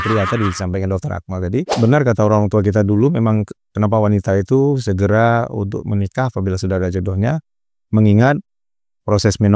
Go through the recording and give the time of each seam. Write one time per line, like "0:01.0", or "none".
0:01.7